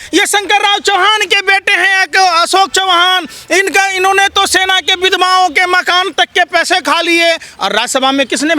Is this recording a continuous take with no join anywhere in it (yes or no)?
yes